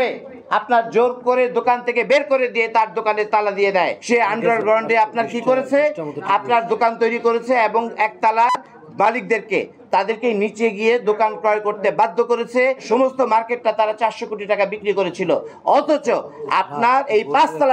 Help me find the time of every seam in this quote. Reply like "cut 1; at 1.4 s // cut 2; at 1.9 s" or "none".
cut 1; at 4.0 s // cut 2; at 12.8 s